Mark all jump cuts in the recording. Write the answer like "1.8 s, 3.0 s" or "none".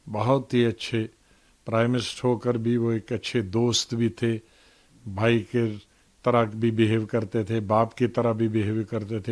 none

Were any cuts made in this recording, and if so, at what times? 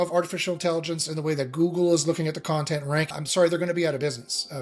3.1 s

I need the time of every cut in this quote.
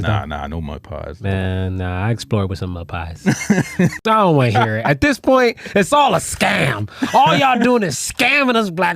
4.0 s

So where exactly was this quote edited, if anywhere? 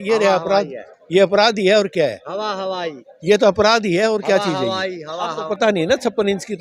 5.5 s

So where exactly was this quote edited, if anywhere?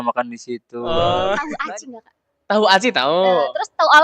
1.5 s

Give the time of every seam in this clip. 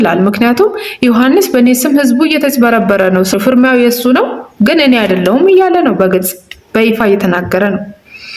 3.3 s

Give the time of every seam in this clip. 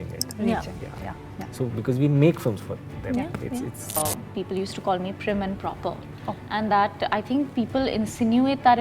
4.0 s

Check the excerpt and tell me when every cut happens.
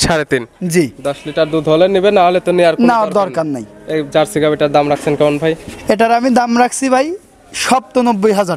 none

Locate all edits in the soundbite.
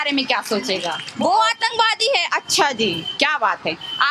1.0 s

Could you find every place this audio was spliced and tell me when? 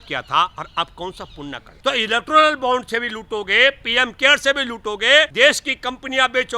1.7 s, 5.3 s

